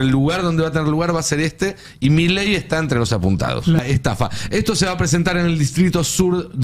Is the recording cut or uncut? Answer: cut